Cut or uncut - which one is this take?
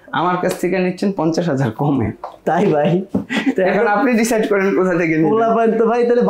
uncut